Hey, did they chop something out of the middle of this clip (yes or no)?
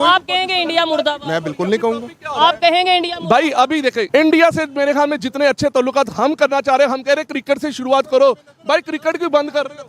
yes